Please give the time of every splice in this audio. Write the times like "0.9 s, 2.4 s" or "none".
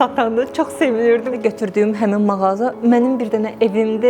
1.4 s